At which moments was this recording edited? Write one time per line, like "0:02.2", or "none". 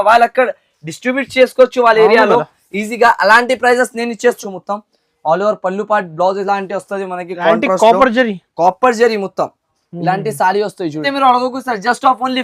0:04.4
0:11.1